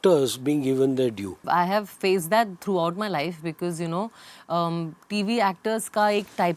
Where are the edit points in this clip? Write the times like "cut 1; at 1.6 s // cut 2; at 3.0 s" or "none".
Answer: cut 1; at 1.4 s